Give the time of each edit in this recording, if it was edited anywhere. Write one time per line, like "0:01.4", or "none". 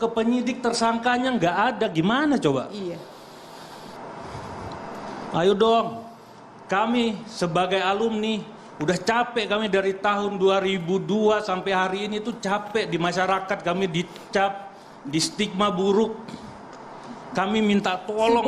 0:04.0